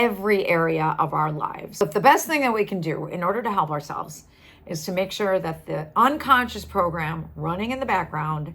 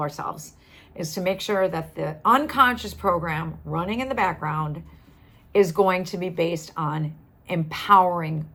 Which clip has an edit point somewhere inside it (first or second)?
first